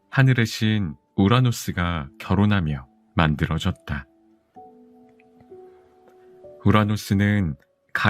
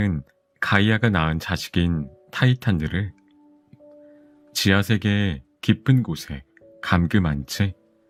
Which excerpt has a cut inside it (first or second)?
first